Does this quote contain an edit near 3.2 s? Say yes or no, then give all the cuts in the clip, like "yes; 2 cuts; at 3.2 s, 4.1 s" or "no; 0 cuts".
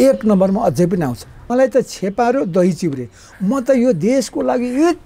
no; 1 cut; at 1.4 s